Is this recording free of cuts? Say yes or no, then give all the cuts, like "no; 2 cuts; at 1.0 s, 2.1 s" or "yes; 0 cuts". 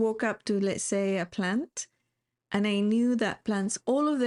yes; 0 cuts